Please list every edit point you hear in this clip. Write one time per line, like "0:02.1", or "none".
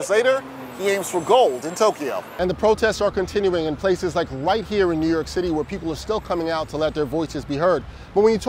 0:02.3